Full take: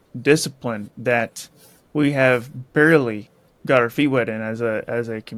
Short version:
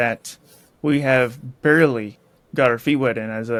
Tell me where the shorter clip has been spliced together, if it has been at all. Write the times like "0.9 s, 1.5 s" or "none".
none